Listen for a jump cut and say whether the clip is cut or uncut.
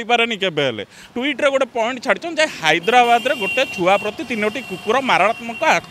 cut